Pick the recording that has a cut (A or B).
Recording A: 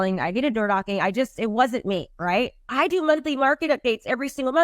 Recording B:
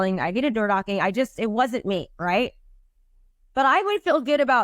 A